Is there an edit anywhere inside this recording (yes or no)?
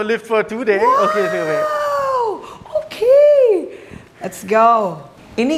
no